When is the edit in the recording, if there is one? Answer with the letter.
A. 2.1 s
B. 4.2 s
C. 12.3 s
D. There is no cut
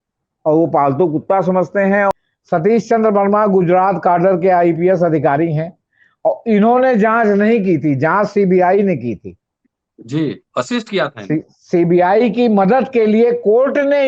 A